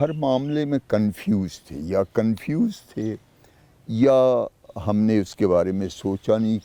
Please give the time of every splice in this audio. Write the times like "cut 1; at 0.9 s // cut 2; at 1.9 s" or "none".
none